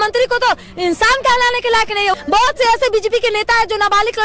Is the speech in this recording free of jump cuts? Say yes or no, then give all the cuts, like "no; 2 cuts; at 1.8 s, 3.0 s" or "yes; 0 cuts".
no; 1 cut; at 2.1 s